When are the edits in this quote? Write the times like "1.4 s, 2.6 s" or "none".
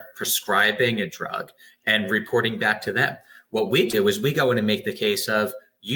none